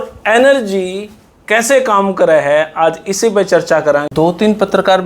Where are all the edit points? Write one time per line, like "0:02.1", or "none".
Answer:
0:04.0